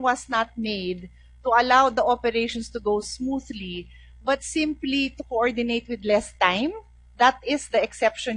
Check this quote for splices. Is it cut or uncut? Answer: cut